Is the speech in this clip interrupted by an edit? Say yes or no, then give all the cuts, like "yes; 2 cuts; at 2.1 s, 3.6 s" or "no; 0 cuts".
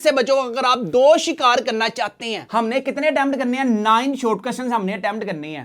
yes; 1 cut; at 2.5 s